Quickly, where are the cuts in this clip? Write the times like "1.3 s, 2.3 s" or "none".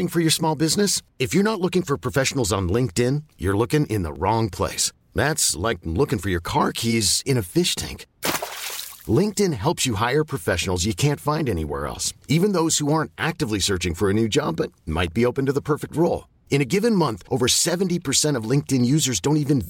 none